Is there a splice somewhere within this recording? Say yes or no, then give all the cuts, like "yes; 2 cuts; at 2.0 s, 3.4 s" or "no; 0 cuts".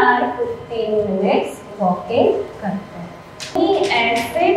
yes; 1 cut; at 3.6 s